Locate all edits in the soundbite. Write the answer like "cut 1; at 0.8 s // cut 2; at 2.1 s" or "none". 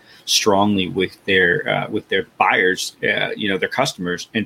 none